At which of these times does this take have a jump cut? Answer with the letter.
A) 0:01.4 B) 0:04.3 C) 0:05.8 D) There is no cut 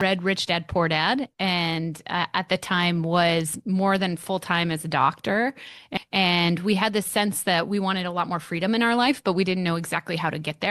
C